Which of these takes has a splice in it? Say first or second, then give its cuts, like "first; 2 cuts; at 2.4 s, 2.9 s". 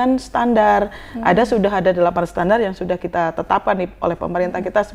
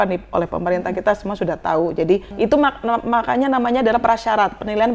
second; 1 cut; at 2.3 s